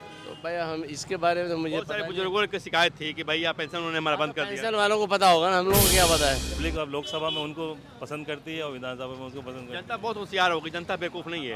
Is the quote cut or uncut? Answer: cut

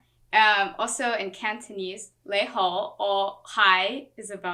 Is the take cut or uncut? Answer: uncut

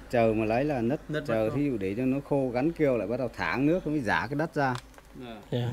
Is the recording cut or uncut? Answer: uncut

